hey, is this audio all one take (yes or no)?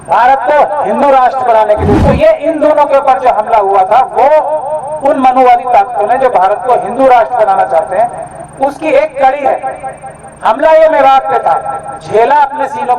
no